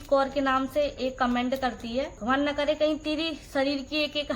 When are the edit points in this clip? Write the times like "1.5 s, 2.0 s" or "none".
2.2 s